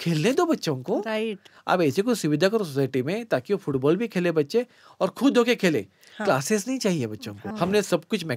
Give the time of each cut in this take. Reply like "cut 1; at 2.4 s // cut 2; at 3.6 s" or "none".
cut 1; at 1.5 s // cut 2; at 7.5 s

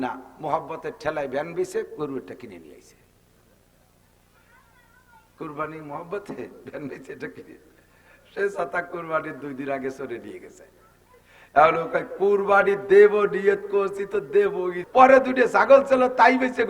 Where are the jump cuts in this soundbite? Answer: cut 1; at 14.7 s

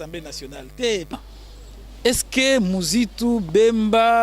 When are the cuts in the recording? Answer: cut 1; at 1.2 s

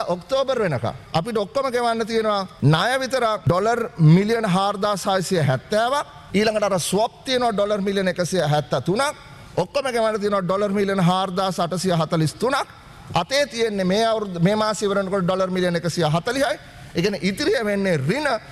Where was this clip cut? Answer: cut 1; at 1.0 s // cut 2; at 2.5 s // cut 3; at 3.4 s // cut 4; at 6.2 s

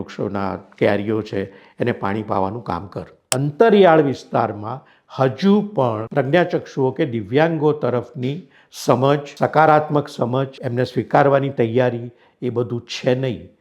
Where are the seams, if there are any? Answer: cut 1; at 3.1 s // cut 2; at 6.0 s // cut 3; at 9.3 s // cut 4; at 10.6 s

